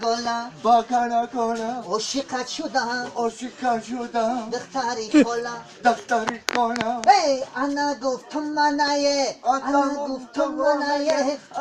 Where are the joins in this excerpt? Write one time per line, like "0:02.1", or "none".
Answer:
0:05.3